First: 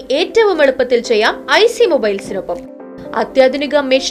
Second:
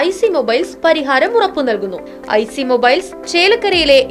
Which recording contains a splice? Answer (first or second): second